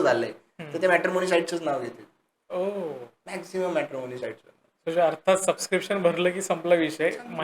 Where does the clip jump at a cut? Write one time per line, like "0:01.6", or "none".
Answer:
none